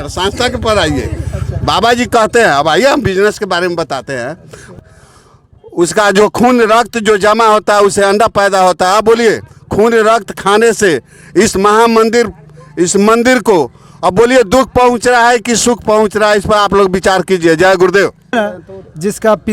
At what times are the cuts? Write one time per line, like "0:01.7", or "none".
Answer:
0:04.8
0:18.3